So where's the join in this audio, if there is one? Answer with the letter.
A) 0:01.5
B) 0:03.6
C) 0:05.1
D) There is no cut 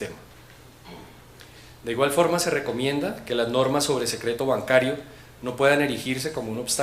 C